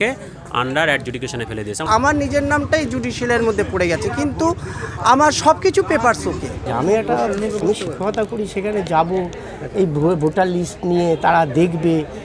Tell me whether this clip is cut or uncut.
cut